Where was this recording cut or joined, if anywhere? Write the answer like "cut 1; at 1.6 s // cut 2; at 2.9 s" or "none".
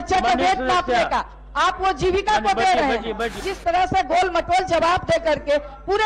cut 1; at 3.5 s